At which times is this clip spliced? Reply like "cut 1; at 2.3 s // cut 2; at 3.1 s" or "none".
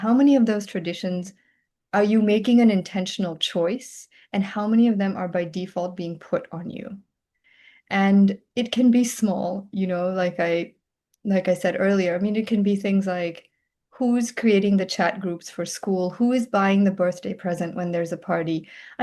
none